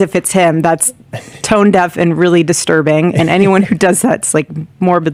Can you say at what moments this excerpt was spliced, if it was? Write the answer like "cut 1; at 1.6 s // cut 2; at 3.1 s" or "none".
none